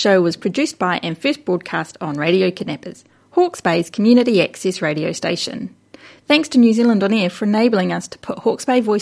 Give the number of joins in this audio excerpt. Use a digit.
0